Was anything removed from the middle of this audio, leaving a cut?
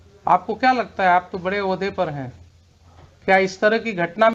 no; 0 cuts

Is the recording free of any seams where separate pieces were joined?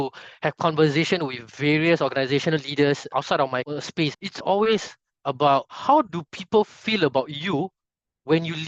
yes; 0 cuts

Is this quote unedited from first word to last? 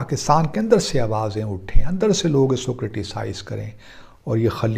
yes; 0 cuts

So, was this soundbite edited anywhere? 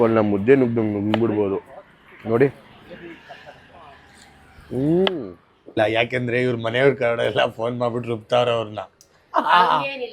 yes; 1 cut; at 5.8 s

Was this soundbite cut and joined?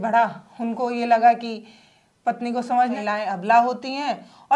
yes; 1 cut; at 3.0 s

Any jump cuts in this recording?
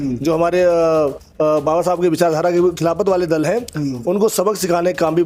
no; 0 cuts

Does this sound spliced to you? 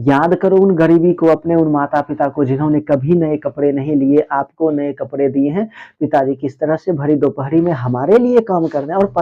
no; 0 cuts

